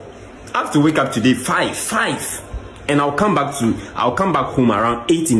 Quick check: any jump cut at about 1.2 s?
no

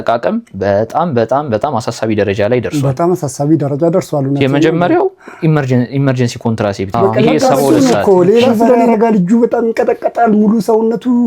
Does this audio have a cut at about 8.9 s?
yes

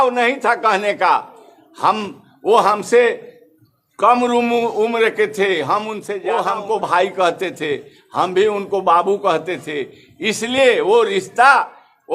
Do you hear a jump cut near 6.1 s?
yes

